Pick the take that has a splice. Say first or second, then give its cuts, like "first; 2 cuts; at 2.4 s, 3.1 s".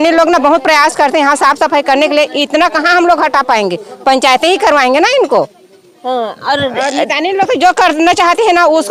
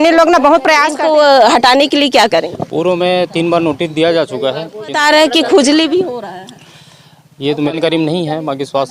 second; 3 cuts; at 1.0 s, 5.0 s, 7.7 s